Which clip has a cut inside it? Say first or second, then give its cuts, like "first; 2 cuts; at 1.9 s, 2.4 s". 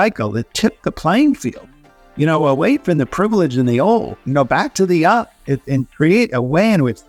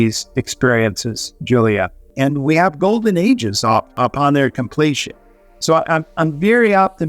second; 2 cuts; at 2.1 s, 4.0 s